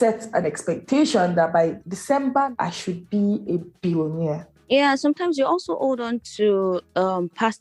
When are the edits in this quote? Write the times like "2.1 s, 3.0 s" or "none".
4.4 s